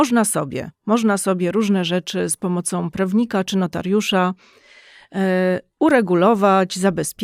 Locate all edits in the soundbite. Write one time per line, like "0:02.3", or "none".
none

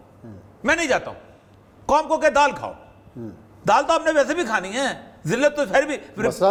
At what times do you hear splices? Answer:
none

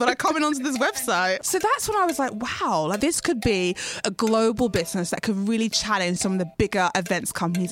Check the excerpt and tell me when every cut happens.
0:01.4
0:03.0

